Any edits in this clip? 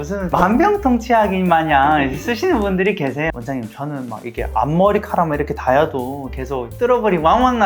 yes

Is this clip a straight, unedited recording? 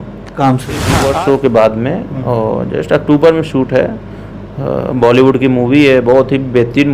no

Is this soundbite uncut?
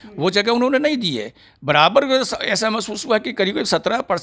yes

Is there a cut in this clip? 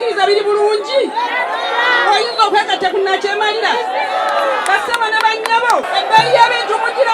yes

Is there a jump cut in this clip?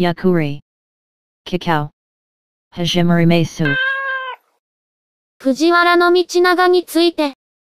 no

